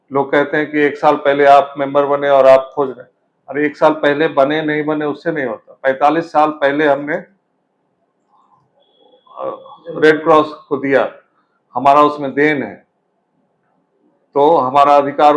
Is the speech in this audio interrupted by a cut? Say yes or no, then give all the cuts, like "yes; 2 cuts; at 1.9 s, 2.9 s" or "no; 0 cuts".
no; 0 cuts